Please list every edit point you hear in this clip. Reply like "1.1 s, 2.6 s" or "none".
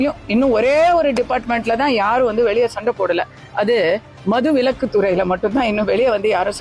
none